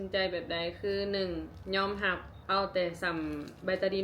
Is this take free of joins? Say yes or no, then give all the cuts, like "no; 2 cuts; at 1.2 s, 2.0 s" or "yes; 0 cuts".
no; 1 cut; at 2.3 s